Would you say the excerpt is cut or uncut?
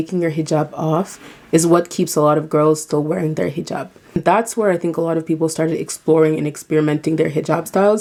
uncut